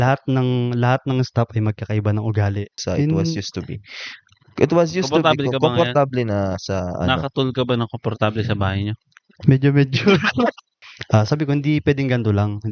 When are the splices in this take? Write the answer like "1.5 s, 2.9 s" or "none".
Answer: 2.8 s, 10.7 s

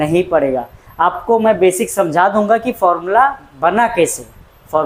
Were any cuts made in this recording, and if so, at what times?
none

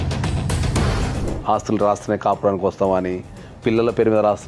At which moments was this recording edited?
1.1 s

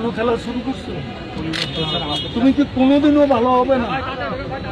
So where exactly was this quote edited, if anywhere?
none

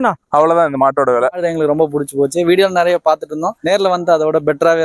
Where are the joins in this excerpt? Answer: 1.4 s, 3.5 s

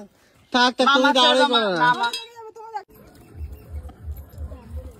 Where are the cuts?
2.9 s

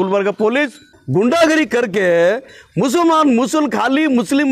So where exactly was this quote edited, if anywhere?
0.9 s

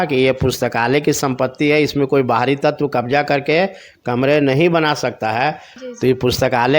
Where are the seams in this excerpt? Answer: 5.7 s

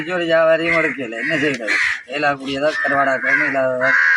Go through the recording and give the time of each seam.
none

